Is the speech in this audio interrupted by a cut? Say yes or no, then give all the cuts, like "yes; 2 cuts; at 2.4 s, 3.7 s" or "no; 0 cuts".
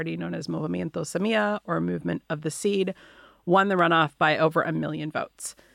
no; 0 cuts